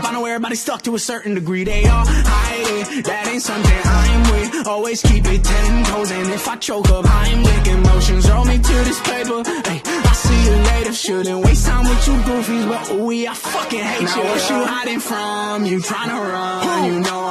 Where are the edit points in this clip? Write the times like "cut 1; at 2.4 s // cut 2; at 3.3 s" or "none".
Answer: none